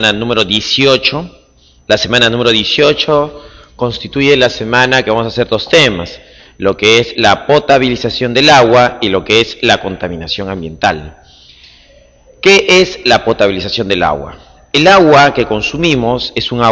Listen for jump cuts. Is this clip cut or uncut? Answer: cut